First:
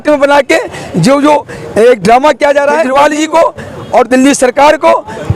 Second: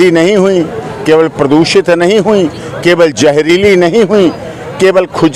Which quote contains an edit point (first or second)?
first